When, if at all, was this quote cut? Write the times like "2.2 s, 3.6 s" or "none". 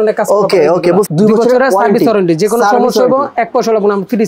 1.1 s